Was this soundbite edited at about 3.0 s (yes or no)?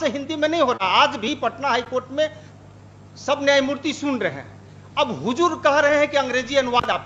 no